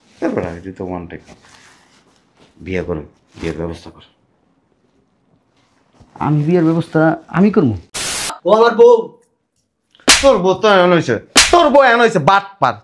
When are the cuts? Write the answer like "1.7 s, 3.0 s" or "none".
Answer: 8.3 s

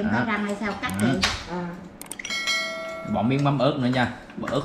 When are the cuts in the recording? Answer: none

